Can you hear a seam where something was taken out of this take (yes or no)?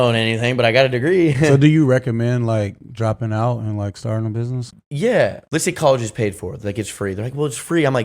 yes